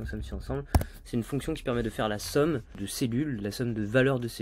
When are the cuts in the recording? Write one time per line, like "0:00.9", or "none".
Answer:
0:02.8